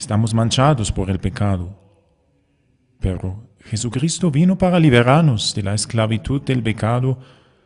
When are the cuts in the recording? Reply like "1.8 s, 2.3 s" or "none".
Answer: 5.9 s